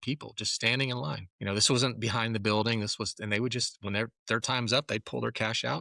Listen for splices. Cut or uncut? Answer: cut